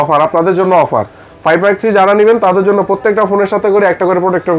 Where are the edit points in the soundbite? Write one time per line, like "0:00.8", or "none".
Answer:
none